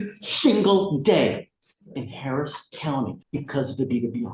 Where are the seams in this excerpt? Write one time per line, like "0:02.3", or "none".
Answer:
0:03.2